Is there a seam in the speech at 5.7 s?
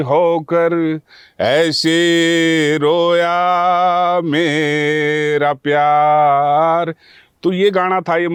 no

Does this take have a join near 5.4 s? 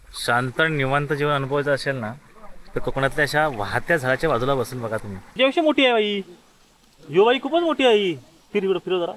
yes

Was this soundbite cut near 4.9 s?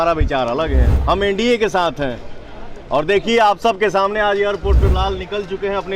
yes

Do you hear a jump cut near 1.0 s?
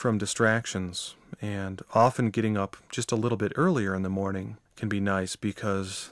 yes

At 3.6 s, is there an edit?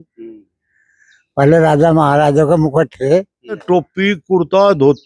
yes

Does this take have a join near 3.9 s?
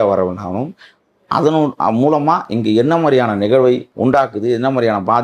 yes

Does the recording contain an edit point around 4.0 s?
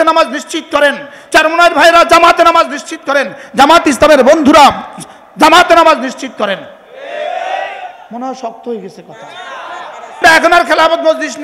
no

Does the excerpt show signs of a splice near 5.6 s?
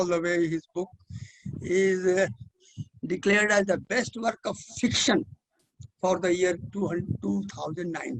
no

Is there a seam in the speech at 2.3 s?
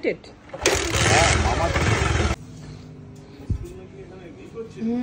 yes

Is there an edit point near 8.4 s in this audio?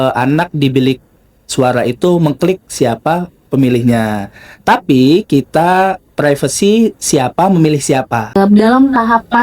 yes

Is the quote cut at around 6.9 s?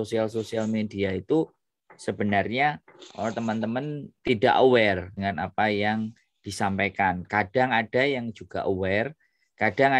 no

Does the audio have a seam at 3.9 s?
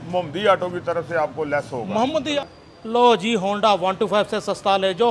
no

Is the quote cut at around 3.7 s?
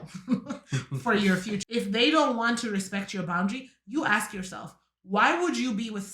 no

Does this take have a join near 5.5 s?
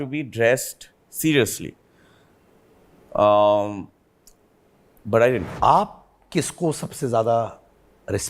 yes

